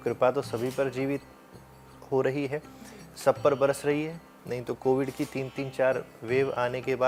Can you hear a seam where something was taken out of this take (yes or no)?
no